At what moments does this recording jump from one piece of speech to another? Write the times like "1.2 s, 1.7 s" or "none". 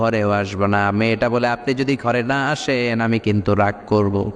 none